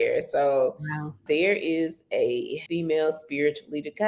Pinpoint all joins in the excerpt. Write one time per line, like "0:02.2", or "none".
0:01.2
0:02.6